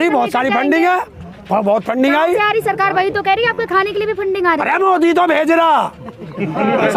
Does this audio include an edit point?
no; 0 cuts

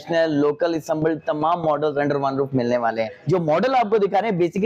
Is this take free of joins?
no; 1 cut; at 3.1 s

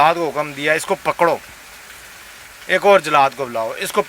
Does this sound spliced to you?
no; 0 cuts

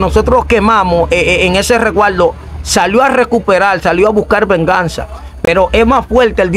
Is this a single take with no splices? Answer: yes; 0 cuts

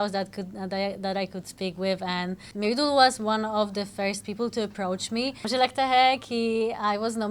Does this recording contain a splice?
yes; 2 cuts; at 2.4 s, 5.4 s

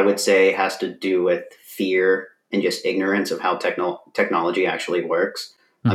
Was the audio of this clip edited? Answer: no; 0 cuts

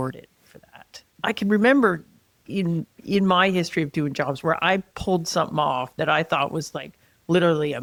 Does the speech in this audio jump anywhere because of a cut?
no; 0 cuts

